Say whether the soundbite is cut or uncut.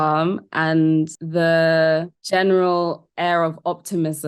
cut